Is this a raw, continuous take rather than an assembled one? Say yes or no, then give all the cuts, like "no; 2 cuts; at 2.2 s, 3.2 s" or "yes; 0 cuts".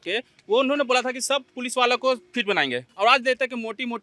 no; 1 cut; at 2.8 s